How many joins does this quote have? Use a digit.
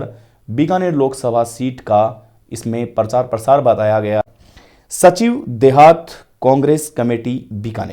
1